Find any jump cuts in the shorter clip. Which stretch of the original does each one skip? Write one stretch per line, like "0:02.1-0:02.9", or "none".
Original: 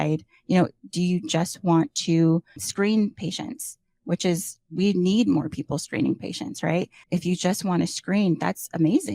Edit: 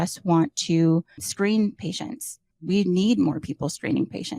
0:03.9-0:04.6